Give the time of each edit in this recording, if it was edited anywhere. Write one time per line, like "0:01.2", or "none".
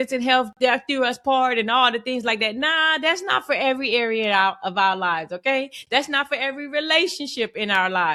none